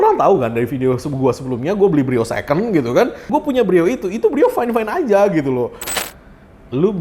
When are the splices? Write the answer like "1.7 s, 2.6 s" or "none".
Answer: 6.0 s